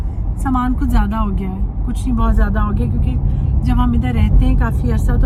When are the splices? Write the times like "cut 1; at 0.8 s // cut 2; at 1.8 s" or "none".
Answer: none